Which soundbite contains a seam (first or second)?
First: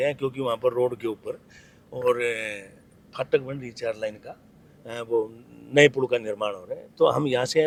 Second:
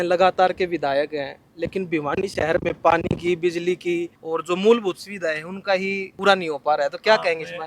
second